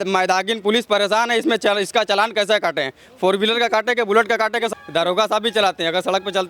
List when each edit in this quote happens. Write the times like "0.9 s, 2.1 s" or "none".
4.7 s